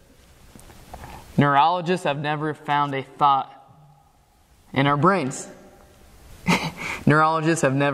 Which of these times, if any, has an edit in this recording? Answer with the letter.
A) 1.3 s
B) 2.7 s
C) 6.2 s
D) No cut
C